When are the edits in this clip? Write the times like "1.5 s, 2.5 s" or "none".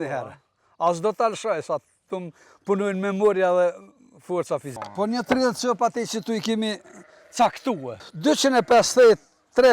4.7 s, 8.0 s